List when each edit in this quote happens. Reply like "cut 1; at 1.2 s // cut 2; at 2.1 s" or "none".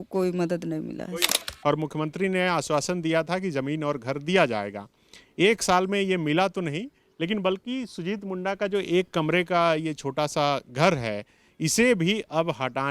cut 1; at 1.4 s